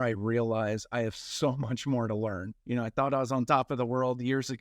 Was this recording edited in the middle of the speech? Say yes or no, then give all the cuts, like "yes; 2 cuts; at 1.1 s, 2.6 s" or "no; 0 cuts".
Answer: yes; 1 cut; at 2.5 s